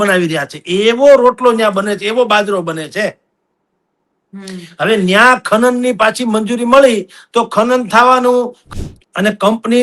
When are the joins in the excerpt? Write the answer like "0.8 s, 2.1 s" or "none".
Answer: 8.6 s